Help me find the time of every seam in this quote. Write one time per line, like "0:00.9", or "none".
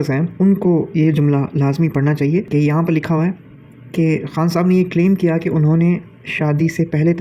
none